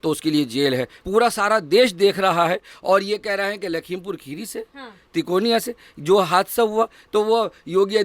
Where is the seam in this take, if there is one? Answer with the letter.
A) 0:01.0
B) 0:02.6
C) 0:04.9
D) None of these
A